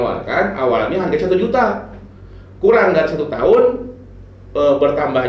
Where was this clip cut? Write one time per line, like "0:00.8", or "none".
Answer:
none

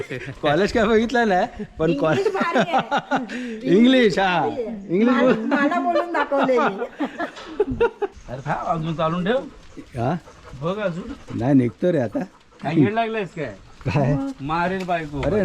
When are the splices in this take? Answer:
none

